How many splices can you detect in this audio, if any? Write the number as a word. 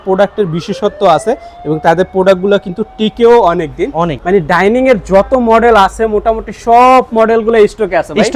one